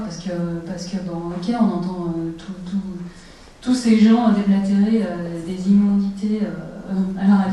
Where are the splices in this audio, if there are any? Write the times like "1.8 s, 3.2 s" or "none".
5.0 s